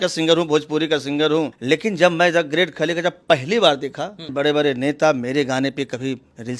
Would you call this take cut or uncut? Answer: cut